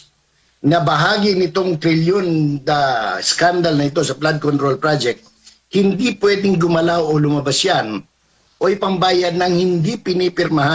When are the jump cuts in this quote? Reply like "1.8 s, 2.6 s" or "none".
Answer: none